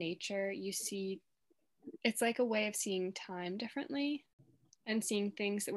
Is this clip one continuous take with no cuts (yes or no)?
no